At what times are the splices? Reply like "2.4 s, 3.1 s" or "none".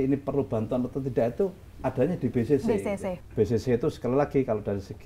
3.2 s